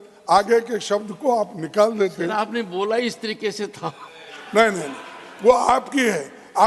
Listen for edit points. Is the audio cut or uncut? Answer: uncut